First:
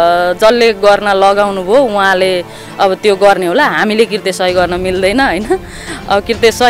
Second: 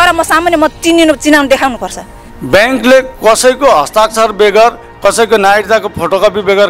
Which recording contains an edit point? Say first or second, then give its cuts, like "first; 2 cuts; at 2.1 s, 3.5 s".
second; 1 cut; at 2.1 s